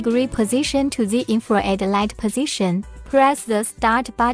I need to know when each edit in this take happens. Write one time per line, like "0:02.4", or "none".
0:03.0